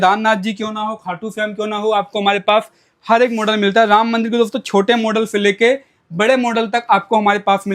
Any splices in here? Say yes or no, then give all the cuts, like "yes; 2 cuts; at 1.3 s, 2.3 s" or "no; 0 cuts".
no; 0 cuts